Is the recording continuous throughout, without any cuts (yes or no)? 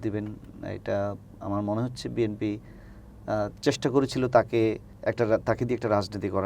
no